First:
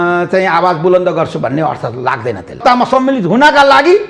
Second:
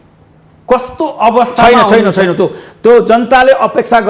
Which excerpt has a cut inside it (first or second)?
first